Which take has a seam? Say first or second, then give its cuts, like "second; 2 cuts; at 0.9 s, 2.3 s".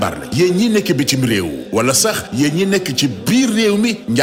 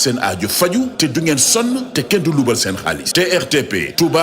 second; 1 cut; at 3.0 s